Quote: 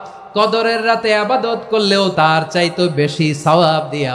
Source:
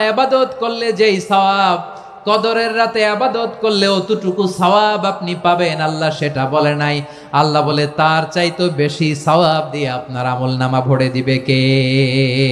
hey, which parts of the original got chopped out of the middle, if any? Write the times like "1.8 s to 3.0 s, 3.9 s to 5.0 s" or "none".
4.0 s to 7.9 s